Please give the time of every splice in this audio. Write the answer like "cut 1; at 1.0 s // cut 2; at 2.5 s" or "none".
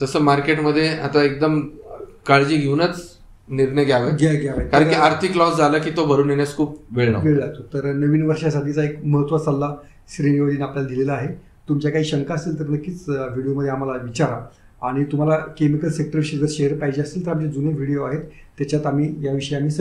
none